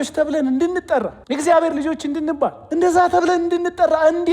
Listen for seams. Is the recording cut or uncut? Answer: cut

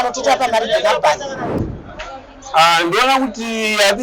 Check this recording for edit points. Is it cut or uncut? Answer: cut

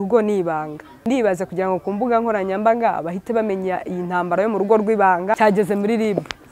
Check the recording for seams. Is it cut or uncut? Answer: cut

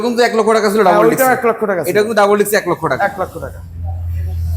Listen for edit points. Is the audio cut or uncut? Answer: uncut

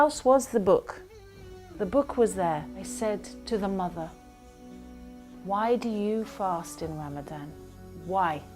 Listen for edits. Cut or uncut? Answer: cut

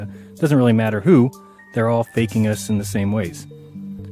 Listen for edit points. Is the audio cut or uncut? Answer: uncut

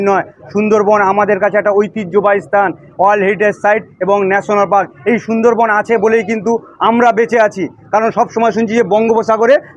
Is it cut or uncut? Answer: uncut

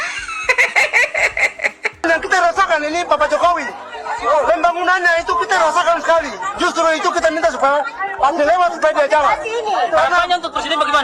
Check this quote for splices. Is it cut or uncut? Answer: cut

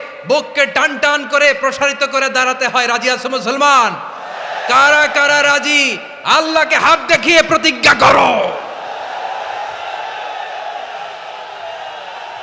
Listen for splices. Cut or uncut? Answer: uncut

